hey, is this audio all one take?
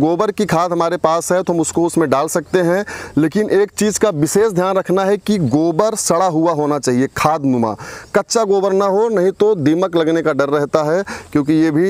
yes; 0 cuts

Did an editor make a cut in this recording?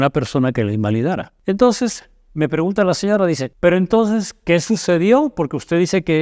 yes; 2 cuts; at 1.3 s, 3.5 s

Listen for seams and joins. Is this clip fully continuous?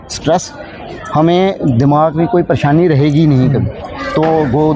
yes; 0 cuts

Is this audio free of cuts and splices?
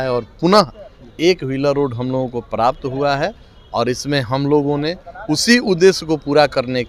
yes; 0 cuts

